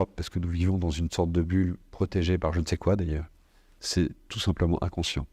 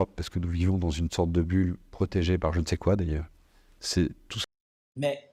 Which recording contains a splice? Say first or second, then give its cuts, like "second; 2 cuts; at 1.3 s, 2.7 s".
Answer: first; 1 cut; at 4.3 s